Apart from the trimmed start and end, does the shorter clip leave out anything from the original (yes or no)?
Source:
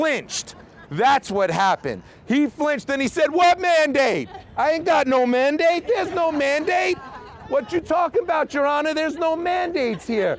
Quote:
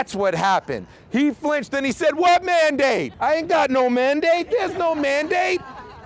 yes